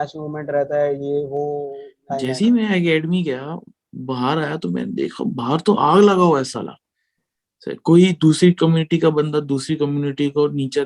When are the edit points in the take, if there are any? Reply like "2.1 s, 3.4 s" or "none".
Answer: 1.9 s